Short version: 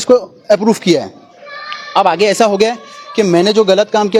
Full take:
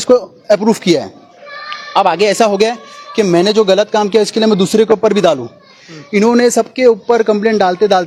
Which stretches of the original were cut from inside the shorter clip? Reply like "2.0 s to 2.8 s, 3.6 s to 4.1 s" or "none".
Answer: none